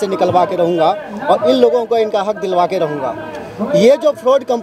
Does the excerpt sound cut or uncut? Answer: uncut